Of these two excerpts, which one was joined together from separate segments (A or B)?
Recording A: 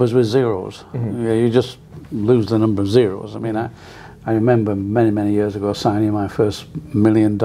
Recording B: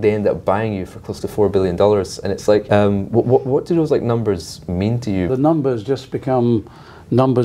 B